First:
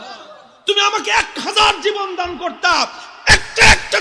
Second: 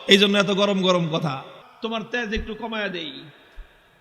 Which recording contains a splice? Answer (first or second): second